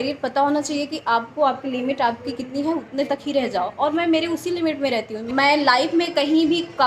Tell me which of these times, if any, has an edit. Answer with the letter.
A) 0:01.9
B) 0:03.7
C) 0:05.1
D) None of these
C